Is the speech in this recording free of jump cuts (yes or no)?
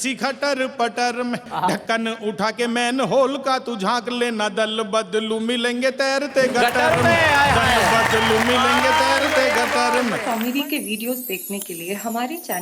no